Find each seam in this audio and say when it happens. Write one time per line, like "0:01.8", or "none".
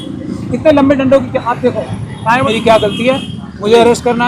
0:02.4